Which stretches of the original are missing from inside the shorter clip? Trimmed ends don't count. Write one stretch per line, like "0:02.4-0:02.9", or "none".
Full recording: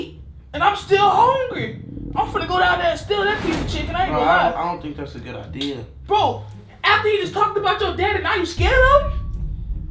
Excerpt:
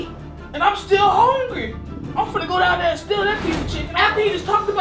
0:03.8-0:06.7